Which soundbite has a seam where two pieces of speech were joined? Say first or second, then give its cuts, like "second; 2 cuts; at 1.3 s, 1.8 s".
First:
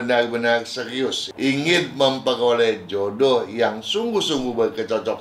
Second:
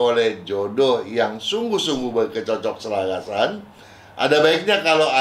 first; 1 cut; at 1.2 s